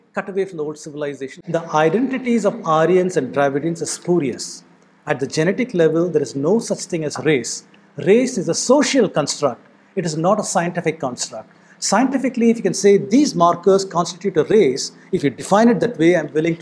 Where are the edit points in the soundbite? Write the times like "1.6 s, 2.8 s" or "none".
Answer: 1.3 s